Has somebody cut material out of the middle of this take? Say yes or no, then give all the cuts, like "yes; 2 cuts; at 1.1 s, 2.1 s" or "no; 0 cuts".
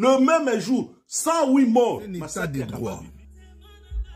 yes; 1 cut; at 2.4 s